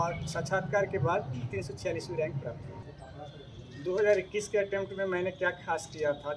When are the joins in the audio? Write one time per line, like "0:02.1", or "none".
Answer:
0:02.8